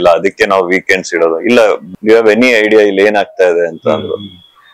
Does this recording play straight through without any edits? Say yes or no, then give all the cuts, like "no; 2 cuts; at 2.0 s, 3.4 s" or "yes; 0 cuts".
no; 1 cut; at 1.8 s